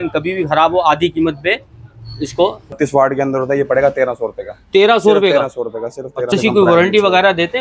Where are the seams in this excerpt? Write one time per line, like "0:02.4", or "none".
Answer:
0:02.7
0:06.3